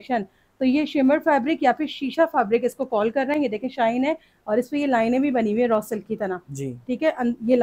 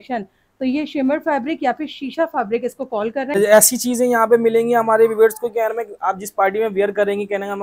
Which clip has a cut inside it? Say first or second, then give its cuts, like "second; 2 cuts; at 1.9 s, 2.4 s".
second; 1 cut; at 3.3 s